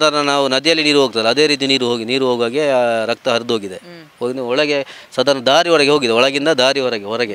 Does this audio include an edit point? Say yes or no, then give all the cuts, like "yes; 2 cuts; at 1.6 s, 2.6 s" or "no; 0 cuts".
no; 0 cuts